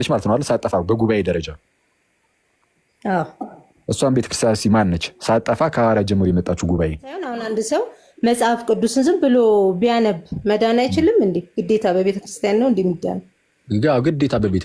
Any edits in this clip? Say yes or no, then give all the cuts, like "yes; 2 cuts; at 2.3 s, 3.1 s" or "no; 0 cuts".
yes; 1 cut; at 7.4 s